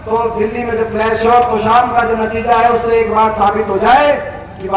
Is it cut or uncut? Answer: uncut